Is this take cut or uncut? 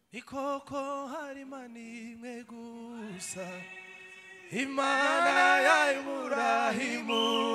uncut